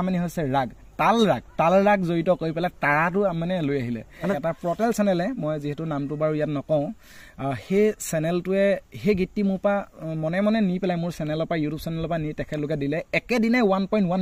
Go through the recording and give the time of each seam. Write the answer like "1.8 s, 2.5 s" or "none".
4.4 s